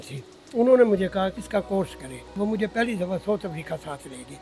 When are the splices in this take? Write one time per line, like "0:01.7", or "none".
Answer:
0:01.4
0:02.3